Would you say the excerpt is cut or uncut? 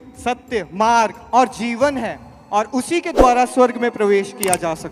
uncut